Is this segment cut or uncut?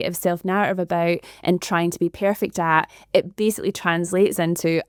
uncut